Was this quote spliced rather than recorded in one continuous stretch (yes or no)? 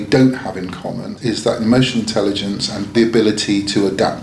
yes